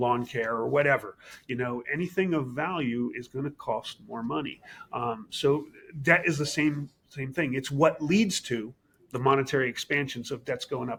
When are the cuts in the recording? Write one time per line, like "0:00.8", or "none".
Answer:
none